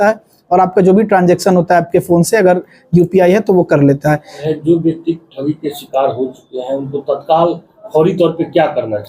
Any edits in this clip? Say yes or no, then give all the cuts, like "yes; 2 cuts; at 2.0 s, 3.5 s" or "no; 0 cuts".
yes; 1 cut; at 4.5 s